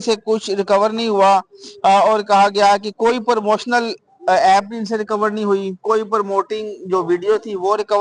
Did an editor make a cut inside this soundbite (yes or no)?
no